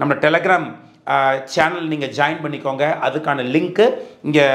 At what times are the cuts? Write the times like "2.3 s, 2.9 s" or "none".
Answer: none